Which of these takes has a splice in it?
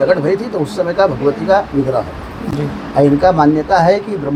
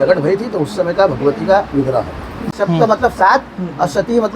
second; 1 cut; at 2.5 s

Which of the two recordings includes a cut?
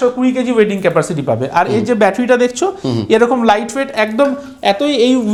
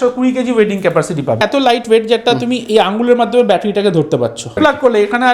second; 2 cuts; at 1.4 s, 4.6 s

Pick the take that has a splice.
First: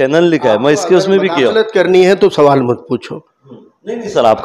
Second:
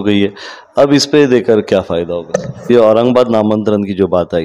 second; 1 cut; at 2.7 s

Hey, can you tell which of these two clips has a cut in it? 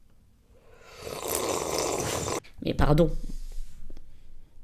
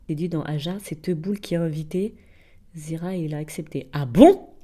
first; 1 cut; at 2.5 s

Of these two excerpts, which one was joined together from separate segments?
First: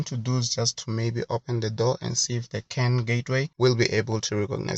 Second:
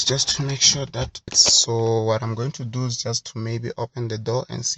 second; 1 cut; at 1.3 s

